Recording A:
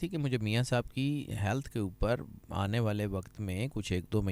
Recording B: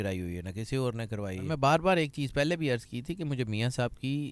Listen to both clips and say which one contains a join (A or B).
B